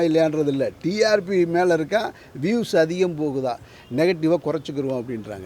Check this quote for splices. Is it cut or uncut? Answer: uncut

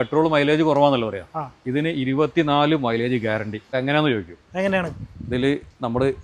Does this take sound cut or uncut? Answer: uncut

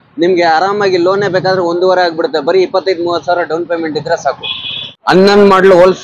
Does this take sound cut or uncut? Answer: cut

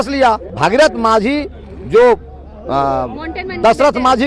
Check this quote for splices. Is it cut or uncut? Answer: uncut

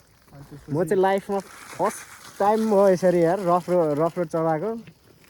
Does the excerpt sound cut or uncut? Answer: uncut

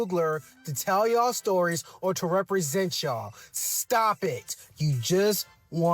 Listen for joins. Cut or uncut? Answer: cut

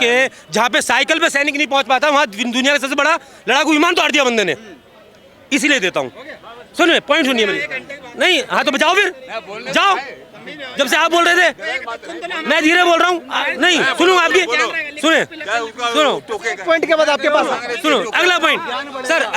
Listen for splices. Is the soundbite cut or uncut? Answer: uncut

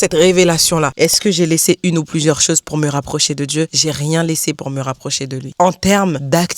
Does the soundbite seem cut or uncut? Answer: cut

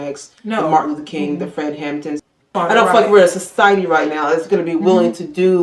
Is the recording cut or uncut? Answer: cut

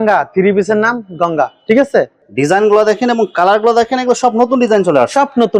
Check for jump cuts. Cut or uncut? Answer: cut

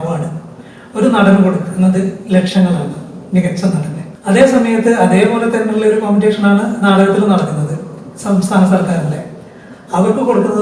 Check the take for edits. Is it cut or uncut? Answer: cut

